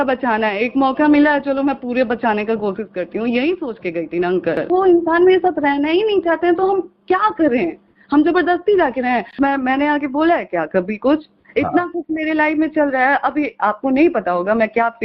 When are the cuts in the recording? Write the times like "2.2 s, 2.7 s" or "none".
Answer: 4.7 s, 9.3 s